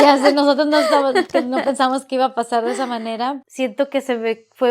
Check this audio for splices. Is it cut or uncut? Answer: cut